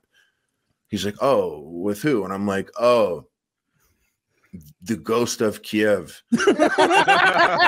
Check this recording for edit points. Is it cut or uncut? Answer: uncut